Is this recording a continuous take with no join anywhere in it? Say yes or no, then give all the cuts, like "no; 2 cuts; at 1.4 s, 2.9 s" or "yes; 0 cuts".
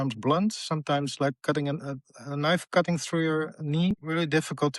no; 1 cut; at 3.9 s